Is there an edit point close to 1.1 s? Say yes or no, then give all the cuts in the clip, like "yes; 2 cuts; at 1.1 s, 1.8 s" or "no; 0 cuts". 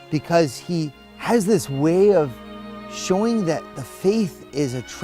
yes; 1 cut; at 1.1 s